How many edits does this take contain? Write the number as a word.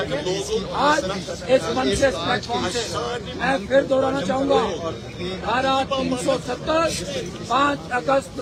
zero